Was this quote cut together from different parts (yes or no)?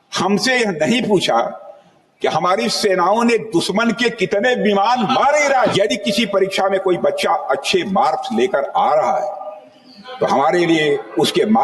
yes